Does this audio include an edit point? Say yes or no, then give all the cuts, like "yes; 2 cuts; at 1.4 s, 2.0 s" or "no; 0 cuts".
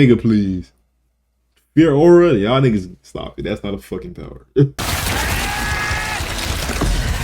yes; 1 cut; at 4.7 s